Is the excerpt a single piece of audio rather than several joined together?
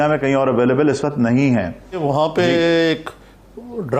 no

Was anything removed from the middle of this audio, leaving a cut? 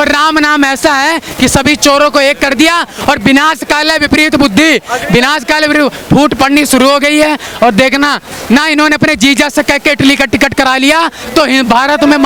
no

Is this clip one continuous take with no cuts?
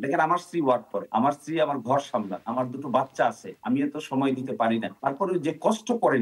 no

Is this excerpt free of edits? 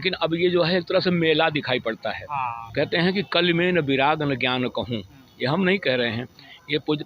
no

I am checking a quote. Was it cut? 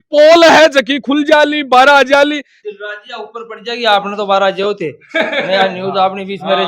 yes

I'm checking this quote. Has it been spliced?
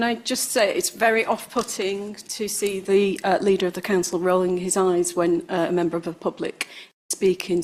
no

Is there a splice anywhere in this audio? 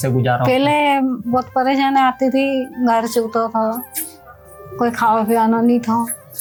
no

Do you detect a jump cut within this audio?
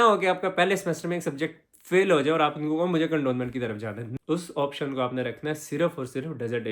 yes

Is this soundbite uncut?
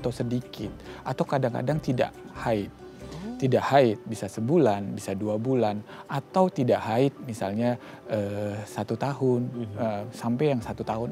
yes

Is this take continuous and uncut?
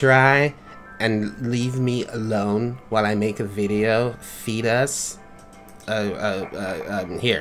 yes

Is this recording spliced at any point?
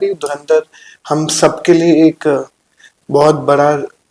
no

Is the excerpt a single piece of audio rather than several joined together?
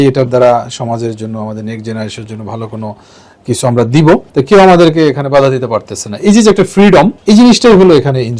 no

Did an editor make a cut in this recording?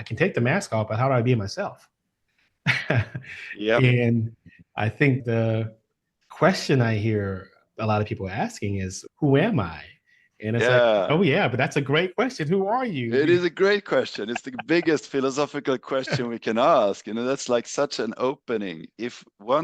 yes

